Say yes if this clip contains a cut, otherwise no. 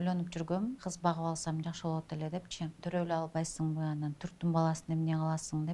yes